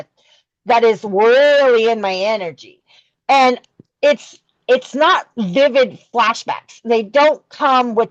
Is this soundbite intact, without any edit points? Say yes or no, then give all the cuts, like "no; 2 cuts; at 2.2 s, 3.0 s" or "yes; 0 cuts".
yes; 0 cuts